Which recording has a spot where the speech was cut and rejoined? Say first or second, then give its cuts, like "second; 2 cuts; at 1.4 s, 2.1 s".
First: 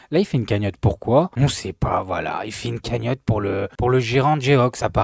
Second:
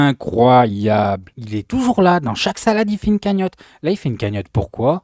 second; 1 cut; at 1.3 s